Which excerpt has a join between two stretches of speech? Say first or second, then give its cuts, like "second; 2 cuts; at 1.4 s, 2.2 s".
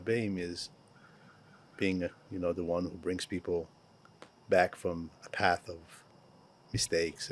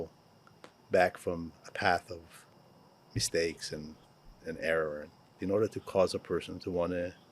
second; 1 cut; at 5.3 s